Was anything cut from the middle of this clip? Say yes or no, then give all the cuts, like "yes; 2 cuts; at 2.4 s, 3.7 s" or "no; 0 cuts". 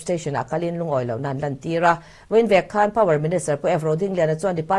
no; 0 cuts